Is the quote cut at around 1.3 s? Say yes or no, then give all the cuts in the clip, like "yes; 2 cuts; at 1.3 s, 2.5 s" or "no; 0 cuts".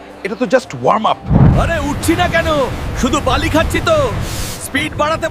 yes; 1 cut; at 1.3 s